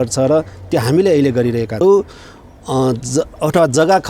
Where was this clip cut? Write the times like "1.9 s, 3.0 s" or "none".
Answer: 1.8 s

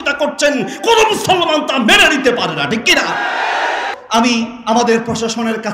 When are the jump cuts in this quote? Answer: 3.9 s

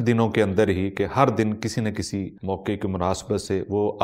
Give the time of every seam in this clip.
2.3 s

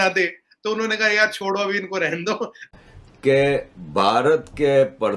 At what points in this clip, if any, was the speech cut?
2.6 s

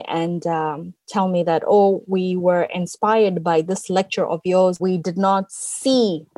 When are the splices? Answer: 5.1 s

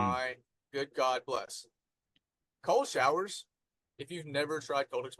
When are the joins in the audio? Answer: none

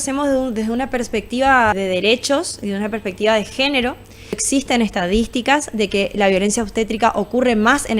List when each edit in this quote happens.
1.8 s, 4.4 s

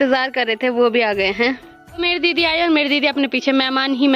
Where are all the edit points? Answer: none

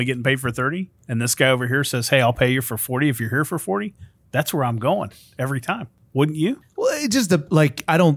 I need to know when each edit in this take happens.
1.0 s, 6.0 s, 6.7 s

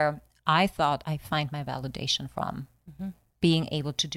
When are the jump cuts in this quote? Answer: 1.0 s

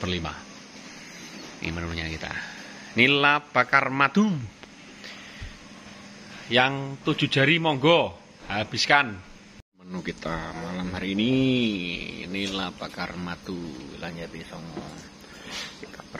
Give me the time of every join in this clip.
none

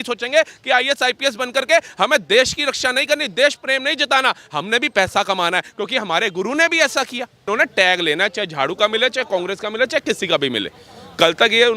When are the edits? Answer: 7.5 s

